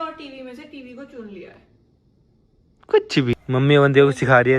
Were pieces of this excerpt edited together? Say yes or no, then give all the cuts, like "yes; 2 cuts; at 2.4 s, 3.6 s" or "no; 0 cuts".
yes; 1 cut; at 3.3 s